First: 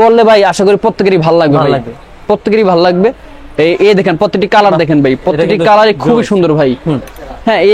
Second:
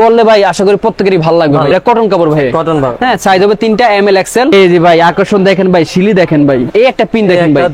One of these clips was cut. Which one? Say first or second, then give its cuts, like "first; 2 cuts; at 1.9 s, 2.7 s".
second; 3 cuts; at 1.7 s, 4.5 s, 6.7 s